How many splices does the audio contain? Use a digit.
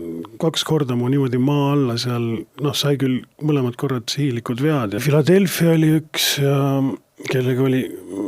1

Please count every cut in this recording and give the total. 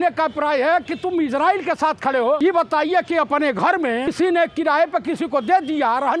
2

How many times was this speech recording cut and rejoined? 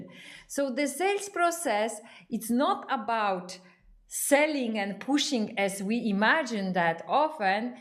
0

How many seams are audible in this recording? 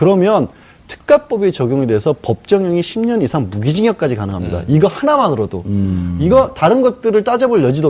1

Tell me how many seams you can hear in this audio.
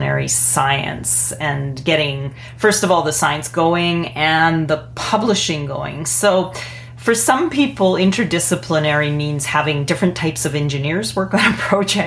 0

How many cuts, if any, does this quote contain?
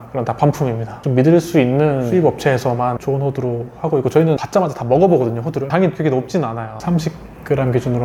2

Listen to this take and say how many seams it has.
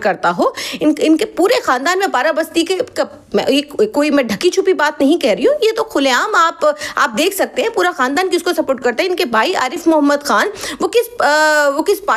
0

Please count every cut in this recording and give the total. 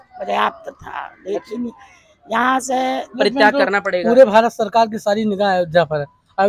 1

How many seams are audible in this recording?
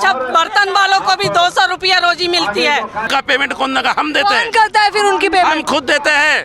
1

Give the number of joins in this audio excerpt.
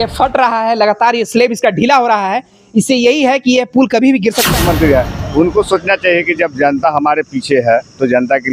1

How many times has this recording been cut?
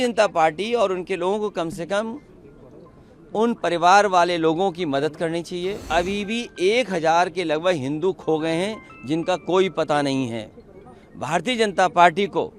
1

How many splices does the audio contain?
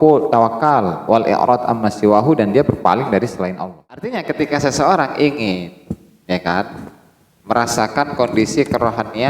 1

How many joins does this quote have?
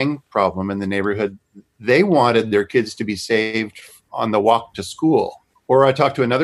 2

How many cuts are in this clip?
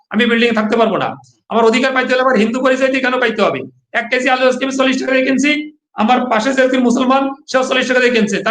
1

